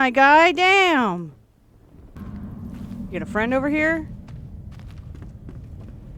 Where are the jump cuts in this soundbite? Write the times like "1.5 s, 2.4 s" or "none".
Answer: 2.2 s